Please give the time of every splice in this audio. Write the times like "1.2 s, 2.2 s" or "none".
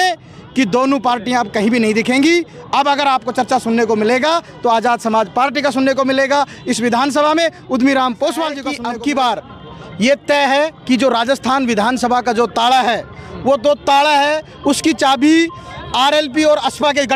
8.7 s